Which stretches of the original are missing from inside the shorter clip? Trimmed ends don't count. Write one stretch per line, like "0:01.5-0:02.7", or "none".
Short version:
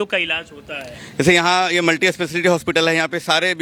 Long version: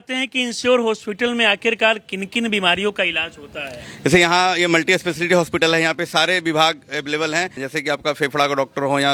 none